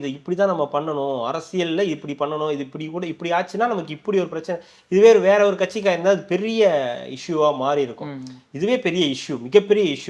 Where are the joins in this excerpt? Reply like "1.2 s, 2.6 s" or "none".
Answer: none